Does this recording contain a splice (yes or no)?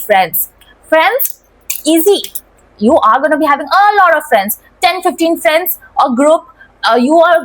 no